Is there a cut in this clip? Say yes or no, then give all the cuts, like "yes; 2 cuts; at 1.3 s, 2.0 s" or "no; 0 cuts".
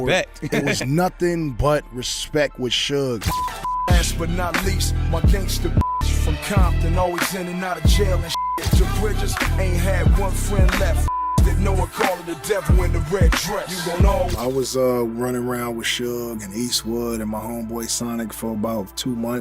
yes; 3 cuts; at 3.2 s, 8.6 s, 14.1 s